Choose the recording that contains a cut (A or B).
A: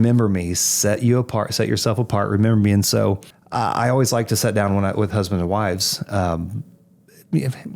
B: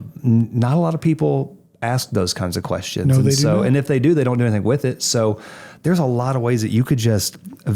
A